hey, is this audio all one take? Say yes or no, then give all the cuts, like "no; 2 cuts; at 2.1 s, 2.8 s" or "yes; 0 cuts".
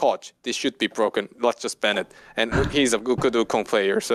yes; 0 cuts